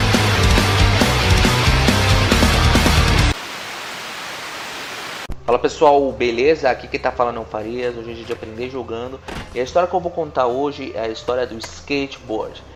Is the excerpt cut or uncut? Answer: uncut